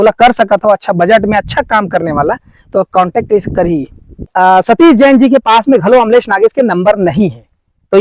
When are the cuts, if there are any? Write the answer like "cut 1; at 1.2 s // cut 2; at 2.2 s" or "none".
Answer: cut 1; at 4.3 s